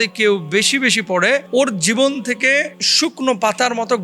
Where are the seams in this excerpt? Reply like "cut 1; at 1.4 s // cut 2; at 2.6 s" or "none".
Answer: cut 1; at 2.7 s